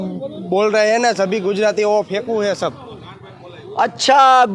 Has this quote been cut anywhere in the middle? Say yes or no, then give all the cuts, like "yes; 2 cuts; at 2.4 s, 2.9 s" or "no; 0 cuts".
no; 0 cuts